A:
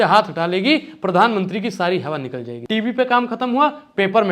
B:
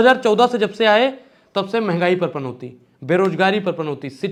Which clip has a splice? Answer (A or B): A